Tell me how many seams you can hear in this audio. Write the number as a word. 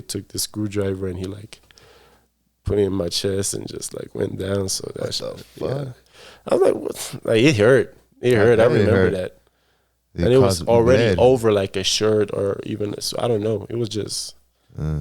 zero